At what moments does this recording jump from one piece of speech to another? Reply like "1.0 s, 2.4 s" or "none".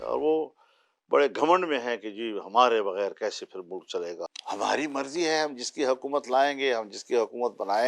4.2 s